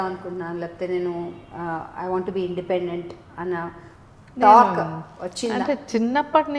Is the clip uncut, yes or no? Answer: yes